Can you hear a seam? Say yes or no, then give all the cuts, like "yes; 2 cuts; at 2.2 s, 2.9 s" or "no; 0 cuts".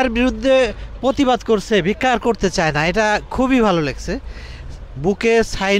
no; 0 cuts